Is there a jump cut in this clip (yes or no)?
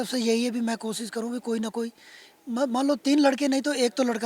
no